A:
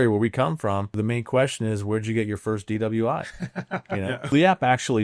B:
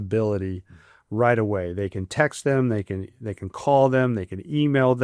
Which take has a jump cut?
A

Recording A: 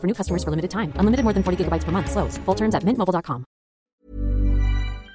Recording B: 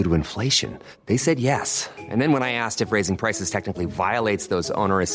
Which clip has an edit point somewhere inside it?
A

